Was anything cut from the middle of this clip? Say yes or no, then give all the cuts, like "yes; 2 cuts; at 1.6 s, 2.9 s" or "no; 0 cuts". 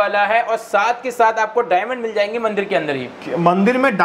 no; 0 cuts